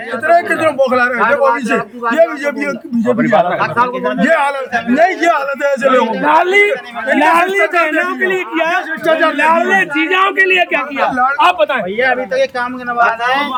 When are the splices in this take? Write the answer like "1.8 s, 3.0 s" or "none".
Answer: none